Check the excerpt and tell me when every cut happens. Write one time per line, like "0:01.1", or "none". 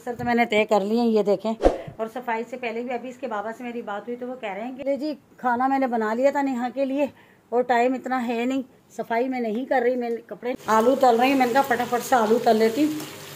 0:04.7
0:10.6